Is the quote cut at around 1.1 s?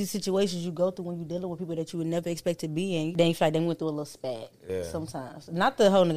no; 1 cut; at 3.1 s

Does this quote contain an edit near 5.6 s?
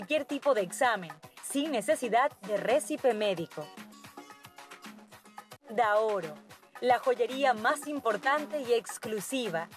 yes; 1 cut; at 5.6 s

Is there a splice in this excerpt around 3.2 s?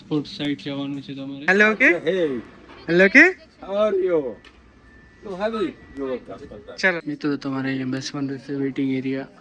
no; 2 cuts; at 1.4 s, 7.0 s

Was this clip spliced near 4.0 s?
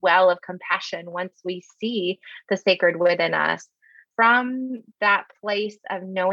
yes; 1 cut; at 4.0 s

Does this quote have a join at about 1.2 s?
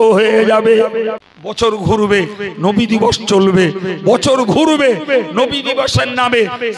yes; 1 cut; at 1.2 s

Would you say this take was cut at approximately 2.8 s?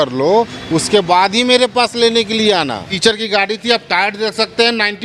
yes; 1 cut; at 2.8 s

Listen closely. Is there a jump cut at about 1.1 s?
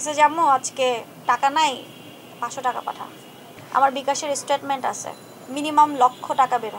yes; 2 cuts; at 1.1 s, 3.4 s

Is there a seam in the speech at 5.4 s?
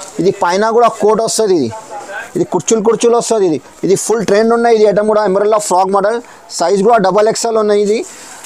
no; 1 cut; at 2.2 s

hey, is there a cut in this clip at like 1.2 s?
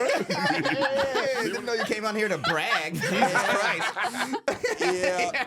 yes; 1 cut; at 1.2 s

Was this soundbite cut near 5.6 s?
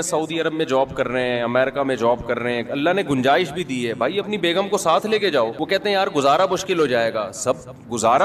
yes; 1 cut; at 5.6 s

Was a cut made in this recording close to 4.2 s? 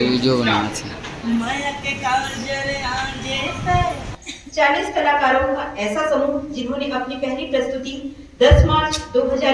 yes; 1 cut; at 4.2 s

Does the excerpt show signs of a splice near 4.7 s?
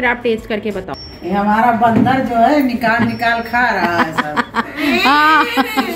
no; 1 cut; at 1.0 s

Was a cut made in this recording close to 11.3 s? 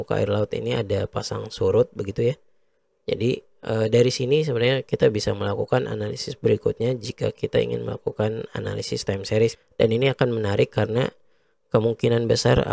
no; 1 cut; at 9.6 s

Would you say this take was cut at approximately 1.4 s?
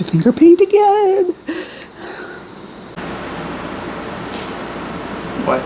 no; 1 cut; at 2.9 s

